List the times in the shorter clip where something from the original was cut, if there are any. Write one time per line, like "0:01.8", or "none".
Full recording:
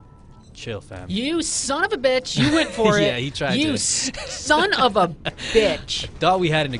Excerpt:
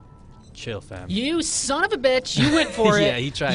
none